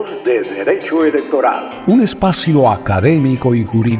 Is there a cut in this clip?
yes; 1 cut; at 1.7 s

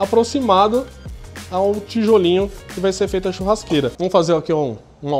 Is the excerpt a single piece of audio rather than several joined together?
no; 1 cut; at 3.9 s

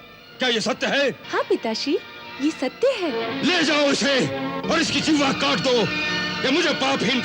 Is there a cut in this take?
yes; 2 cuts; at 1.2 s, 3.3 s

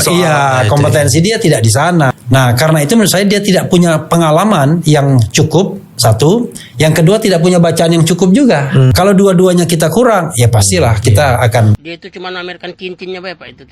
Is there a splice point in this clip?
yes; 3 cuts; at 2.1 s, 8.9 s, 11.8 s

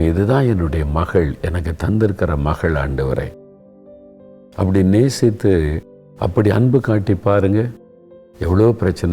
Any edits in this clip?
no; 0 cuts

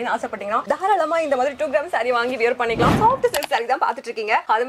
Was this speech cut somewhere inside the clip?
yes; 1 cut; at 2.9 s

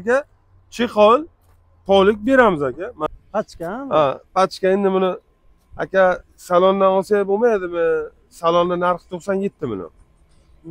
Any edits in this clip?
yes; 1 cut; at 2.9 s

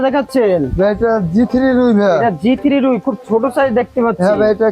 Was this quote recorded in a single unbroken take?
yes; 0 cuts

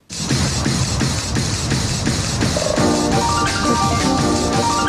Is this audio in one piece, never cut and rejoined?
yes; 0 cuts

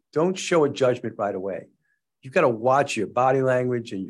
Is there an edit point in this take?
no; 0 cuts

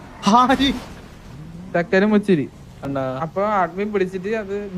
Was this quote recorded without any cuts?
no; 1 cut; at 2.9 s

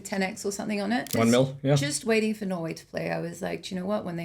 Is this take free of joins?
no; 1 cut; at 1.1 s

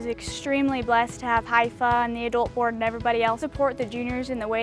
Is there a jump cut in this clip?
yes; 1 cut; at 3.5 s

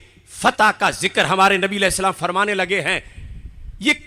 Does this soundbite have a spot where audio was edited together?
no; 0 cuts

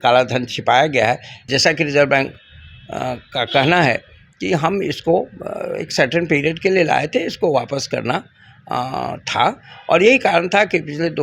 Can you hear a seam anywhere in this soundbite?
yes; 1 cut; at 1.4 s

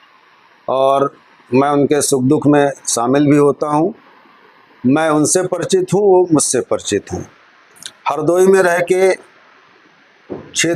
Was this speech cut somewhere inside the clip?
no; 0 cuts

